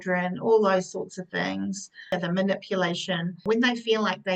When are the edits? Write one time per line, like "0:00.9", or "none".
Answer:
0:02.1
0:03.4